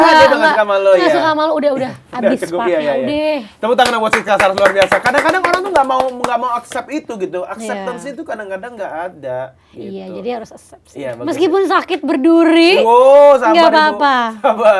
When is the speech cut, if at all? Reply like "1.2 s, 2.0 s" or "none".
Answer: none

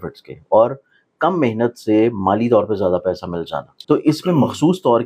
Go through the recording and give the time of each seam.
3.7 s

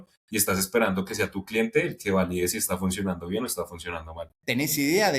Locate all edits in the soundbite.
4.3 s

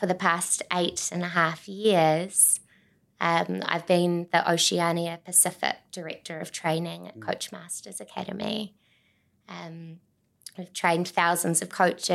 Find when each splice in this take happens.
none

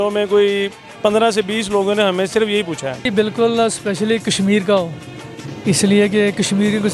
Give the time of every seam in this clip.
3.1 s

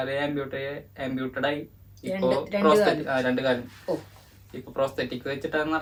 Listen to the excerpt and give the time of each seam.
none

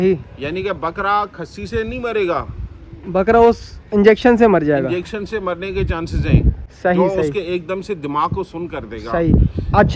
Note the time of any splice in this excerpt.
none

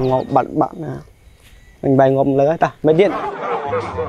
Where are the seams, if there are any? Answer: 3.2 s

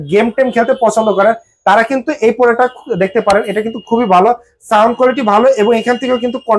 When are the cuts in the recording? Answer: none

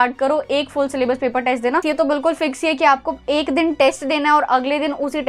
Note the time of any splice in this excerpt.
1.8 s

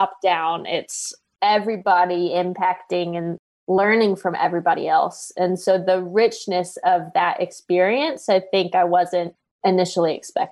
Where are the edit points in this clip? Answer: 9.4 s

